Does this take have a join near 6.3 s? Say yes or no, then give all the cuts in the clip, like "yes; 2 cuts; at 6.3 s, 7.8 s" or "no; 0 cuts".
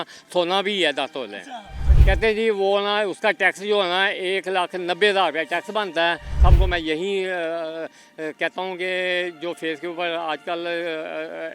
yes; 1 cut; at 6.3 s